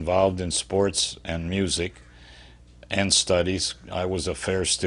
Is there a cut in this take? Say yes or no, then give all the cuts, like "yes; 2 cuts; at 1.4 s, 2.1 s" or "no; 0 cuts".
no; 0 cuts